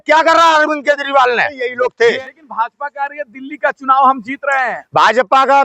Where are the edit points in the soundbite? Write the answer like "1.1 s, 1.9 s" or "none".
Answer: 1.6 s